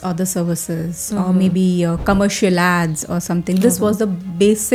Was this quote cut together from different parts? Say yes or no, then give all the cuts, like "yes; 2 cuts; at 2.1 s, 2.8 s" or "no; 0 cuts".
no; 0 cuts